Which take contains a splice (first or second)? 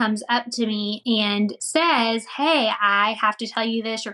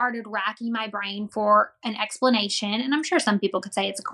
first